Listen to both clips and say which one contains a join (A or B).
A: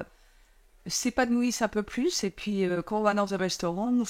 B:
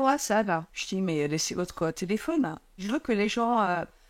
B